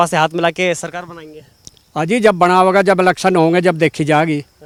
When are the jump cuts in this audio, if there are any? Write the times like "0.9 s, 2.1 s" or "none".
none

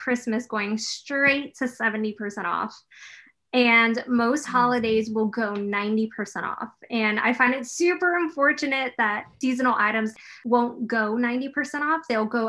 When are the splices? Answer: 10.1 s

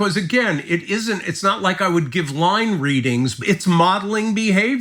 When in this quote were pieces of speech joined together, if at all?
3.4 s

